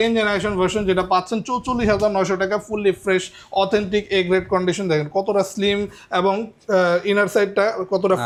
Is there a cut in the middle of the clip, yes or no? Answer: no